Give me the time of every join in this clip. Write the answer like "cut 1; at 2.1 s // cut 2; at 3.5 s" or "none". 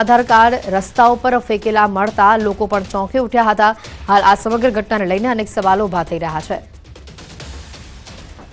cut 1; at 2.1 s